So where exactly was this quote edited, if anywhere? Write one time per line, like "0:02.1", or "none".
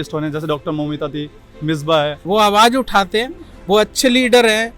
0:02.2